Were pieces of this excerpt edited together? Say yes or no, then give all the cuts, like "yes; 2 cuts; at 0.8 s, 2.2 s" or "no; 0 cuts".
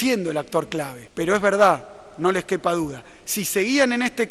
yes; 1 cut; at 1.0 s